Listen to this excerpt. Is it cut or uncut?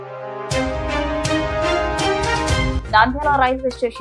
cut